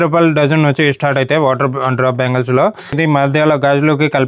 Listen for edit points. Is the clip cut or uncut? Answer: cut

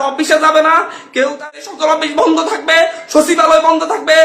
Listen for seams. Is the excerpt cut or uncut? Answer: cut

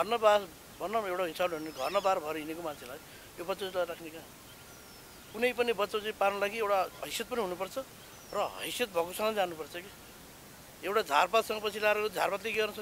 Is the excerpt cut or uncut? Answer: uncut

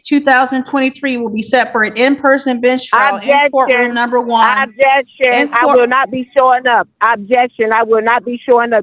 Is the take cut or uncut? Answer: uncut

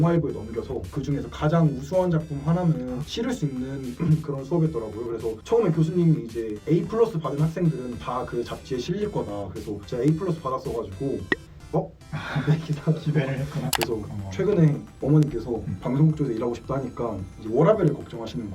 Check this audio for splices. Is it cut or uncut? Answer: cut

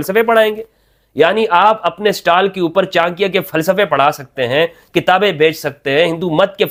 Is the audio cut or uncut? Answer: uncut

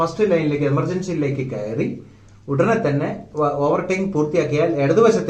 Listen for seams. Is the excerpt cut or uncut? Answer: uncut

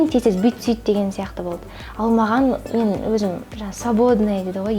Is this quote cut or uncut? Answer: uncut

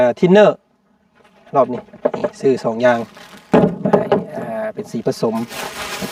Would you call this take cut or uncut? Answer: uncut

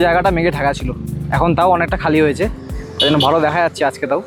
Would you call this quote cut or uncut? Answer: uncut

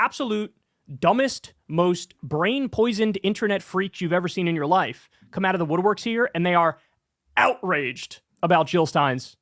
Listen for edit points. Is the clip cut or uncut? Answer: uncut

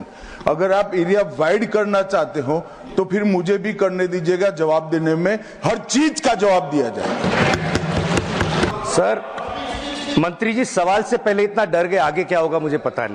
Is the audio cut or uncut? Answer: cut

